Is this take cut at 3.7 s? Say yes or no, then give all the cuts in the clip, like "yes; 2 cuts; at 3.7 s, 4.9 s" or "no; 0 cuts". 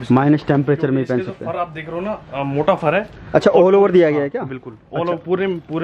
no; 0 cuts